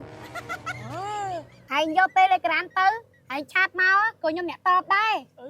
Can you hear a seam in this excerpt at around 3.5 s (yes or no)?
no